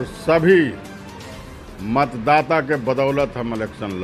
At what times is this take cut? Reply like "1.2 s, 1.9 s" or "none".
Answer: none